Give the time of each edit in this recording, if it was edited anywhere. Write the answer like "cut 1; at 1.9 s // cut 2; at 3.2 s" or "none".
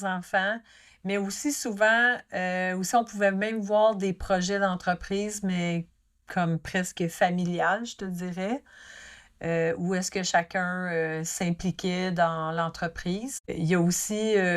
cut 1; at 13.5 s